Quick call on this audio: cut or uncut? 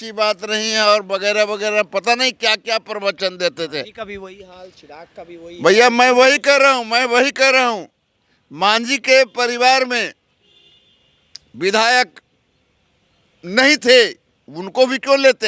uncut